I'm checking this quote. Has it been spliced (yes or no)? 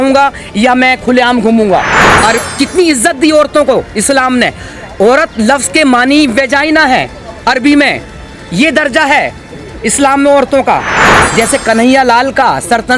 yes